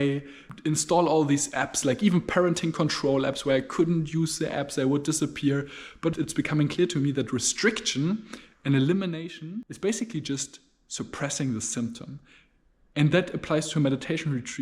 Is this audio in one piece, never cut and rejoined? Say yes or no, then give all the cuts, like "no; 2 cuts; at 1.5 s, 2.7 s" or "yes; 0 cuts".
no; 2 cuts; at 6.1 s, 9.7 s